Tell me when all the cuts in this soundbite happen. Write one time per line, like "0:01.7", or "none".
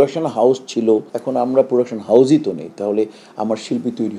0:01.1

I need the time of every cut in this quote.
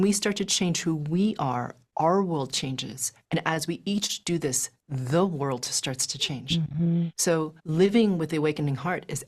0:07.6

